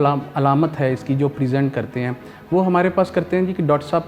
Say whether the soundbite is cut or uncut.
uncut